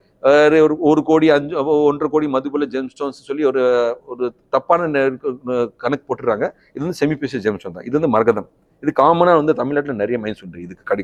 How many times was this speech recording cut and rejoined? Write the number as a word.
zero